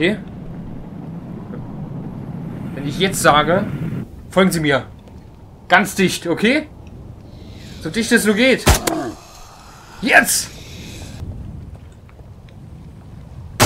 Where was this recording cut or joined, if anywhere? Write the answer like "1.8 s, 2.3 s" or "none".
11.2 s